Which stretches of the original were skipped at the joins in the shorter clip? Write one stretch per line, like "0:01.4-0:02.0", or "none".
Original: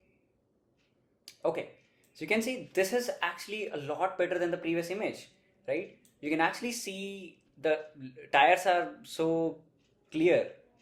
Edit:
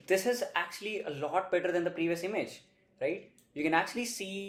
none